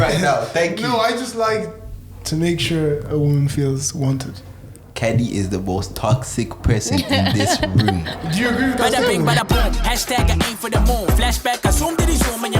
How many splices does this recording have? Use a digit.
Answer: 1